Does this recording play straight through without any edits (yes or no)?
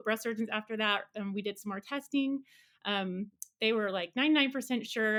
yes